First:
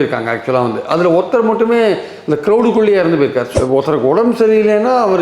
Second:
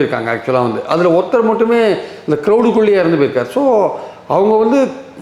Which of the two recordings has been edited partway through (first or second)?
first